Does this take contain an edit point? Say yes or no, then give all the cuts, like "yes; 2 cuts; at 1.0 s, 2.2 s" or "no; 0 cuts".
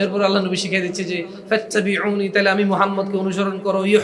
no; 0 cuts